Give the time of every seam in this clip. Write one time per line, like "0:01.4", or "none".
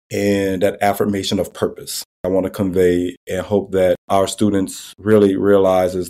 0:02.3

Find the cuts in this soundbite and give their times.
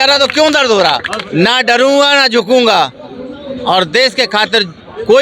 0:01.2

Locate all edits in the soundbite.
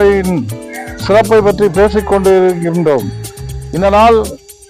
none

